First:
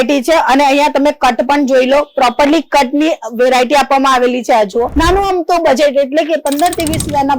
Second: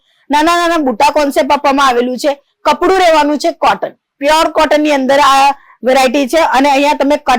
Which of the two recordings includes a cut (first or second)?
first